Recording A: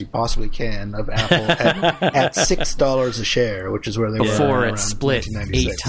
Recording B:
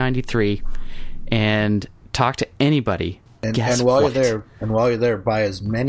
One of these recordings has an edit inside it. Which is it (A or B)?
B